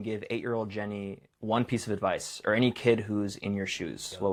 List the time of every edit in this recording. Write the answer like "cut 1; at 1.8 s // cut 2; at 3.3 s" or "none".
none